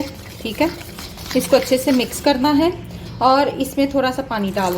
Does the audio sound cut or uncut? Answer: uncut